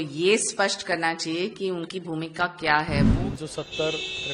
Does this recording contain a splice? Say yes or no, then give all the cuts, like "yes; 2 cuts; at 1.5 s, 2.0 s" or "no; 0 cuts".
yes; 1 cut; at 3.1 s